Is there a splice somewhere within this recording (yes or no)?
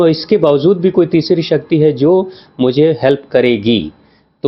no